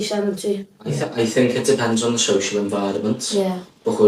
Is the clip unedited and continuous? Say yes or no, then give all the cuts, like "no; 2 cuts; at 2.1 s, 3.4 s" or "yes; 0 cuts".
no; 1 cut; at 1.0 s